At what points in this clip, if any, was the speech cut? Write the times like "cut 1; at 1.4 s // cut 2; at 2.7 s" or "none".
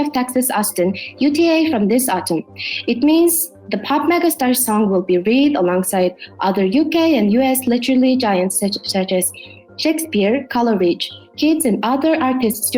none